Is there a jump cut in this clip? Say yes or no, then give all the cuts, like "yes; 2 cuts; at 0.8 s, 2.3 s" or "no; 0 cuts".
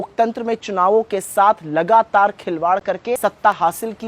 yes; 1 cut; at 3.2 s